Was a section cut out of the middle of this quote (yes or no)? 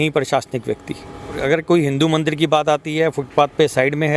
yes